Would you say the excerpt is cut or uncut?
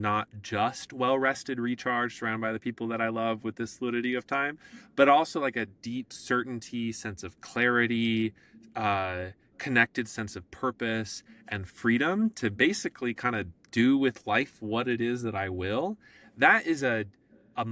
uncut